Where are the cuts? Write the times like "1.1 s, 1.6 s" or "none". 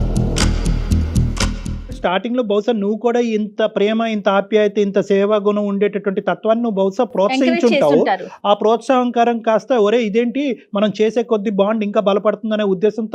none